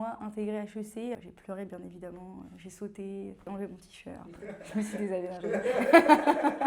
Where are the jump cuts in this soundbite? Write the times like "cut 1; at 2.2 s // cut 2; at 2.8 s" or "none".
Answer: cut 1; at 1.1 s